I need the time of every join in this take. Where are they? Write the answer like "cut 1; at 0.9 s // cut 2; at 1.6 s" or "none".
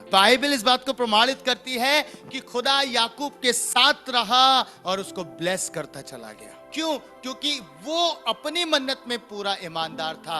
cut 1; at 6.6 s